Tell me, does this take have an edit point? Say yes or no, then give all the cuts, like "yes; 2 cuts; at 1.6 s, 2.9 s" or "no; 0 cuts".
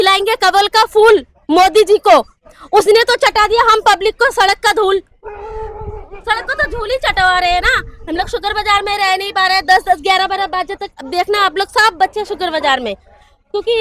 no; 0 cuts